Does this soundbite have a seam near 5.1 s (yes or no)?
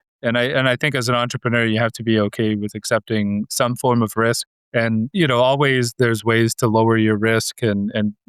yes